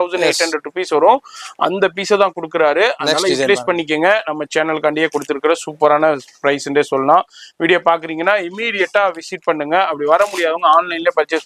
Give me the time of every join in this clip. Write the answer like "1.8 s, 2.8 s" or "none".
none